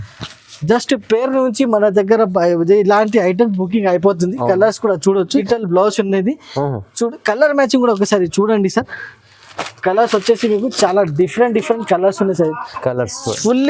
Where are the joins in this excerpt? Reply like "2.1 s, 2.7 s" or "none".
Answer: 5.4 s

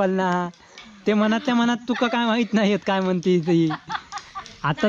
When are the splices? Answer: 1.0 s

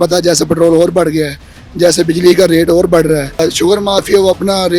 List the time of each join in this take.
3.4 s

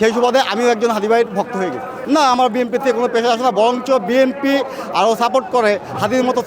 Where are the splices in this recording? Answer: 1.9 s

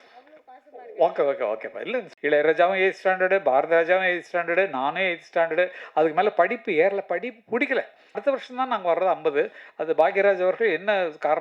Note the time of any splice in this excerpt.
2.1 s, 8.2 s

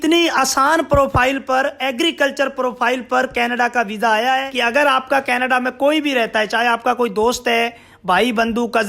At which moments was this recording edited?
4.5 s

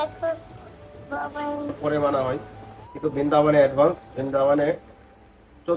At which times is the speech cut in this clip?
1.8 s

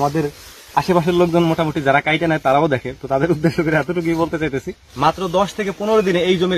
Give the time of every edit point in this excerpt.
4.8 s

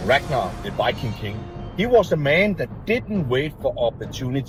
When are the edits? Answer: none

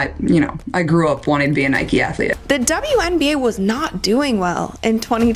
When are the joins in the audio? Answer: 2.3 s

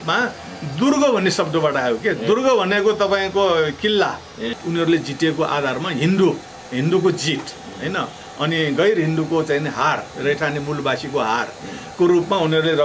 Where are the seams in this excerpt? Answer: 4.5 s

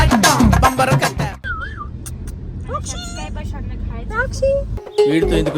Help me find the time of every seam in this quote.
1.4 s

